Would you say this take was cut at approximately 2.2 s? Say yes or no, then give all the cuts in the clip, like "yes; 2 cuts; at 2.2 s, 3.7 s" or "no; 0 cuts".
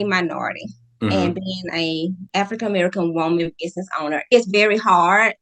yes; 1 cut; at 2.2 s